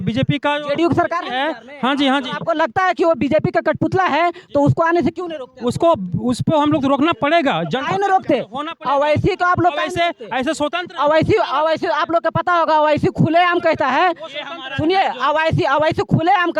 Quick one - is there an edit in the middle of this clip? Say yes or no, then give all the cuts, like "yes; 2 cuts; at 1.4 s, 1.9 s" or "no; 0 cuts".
no; 0 cuts